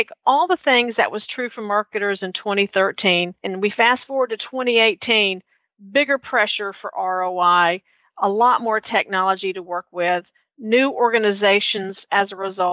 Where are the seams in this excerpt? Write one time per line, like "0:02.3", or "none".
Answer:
0:03.4